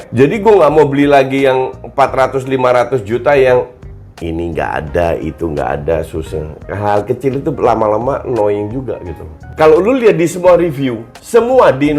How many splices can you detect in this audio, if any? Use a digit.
1